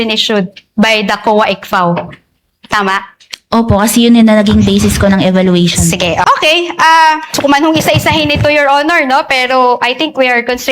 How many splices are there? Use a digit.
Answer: 2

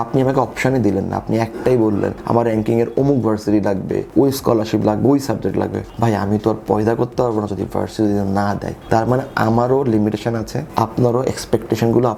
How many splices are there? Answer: 0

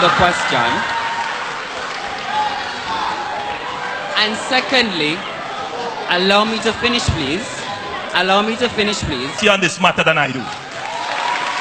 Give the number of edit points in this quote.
1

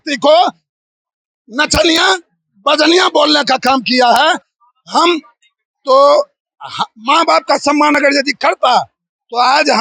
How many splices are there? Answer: 0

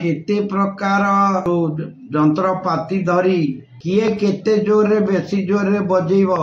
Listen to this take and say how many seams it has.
2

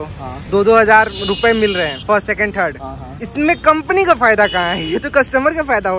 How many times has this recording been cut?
0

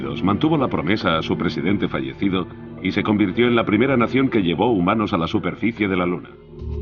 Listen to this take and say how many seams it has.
1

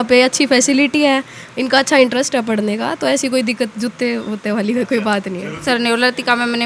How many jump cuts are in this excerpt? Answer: 1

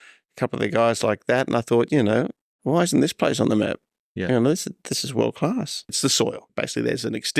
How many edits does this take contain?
1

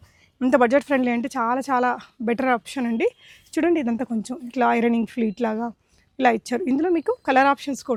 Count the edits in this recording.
0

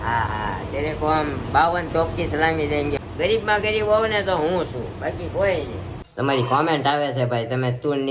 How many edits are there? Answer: 2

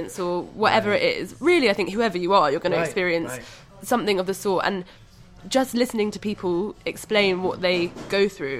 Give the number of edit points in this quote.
0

